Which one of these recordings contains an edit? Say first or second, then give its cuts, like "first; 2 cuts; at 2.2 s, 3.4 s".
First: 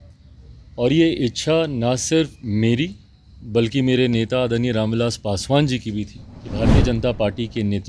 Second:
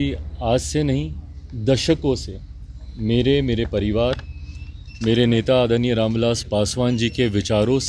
first; 1 cut; at 6.7 s